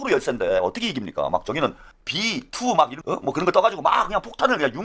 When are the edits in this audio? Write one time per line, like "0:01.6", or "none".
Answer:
0:01.9
0:03.0